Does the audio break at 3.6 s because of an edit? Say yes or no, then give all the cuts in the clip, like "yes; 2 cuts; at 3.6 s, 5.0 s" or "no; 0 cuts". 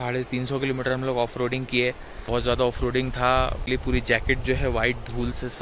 yes; 2 cuts; at 1.6 s, 3.6 s